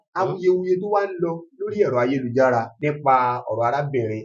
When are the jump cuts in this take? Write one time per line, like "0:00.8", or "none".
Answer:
0:02.7